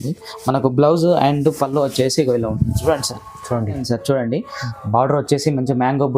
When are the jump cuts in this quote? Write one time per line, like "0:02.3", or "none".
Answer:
0:03.8